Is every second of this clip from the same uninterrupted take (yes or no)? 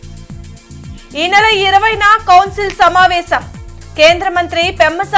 no